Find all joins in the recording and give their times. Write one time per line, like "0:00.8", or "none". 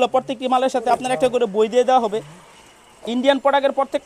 none